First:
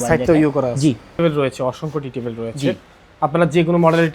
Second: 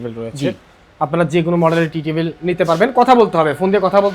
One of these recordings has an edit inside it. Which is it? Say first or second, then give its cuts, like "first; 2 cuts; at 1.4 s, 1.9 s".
first; 1 cut; at 1.2 s